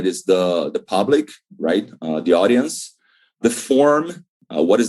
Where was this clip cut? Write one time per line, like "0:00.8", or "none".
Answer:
0:03.4